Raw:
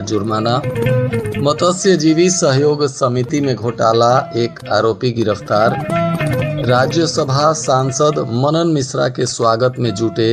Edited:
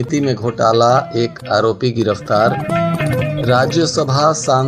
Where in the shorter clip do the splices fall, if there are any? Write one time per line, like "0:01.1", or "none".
none